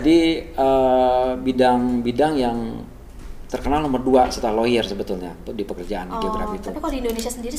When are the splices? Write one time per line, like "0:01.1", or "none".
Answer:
none